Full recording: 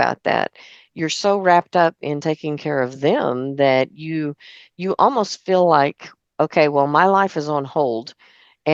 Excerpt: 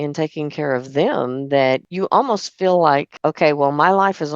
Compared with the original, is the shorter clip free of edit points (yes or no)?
no